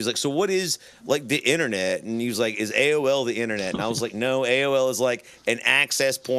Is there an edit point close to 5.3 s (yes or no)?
no